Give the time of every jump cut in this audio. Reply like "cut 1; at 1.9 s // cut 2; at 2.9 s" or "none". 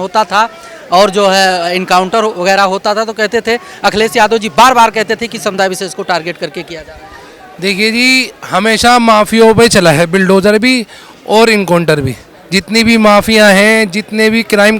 none